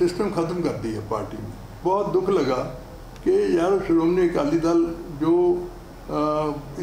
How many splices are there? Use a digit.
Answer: 1